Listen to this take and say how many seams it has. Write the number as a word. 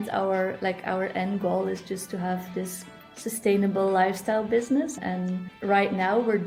zero